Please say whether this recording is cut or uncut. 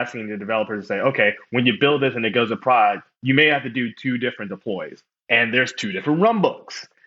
cut